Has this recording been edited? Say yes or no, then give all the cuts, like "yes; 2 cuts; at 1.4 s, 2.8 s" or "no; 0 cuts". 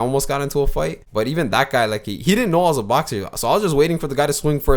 yes; 1 cut; at 1.0 s